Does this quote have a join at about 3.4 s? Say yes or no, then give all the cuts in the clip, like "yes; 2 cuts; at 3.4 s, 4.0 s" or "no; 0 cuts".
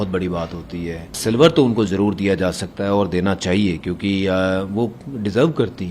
no; 1 cut; at 1.2 s